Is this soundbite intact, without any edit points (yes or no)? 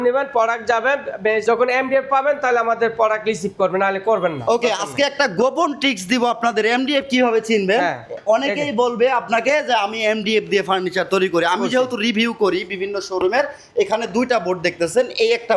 yes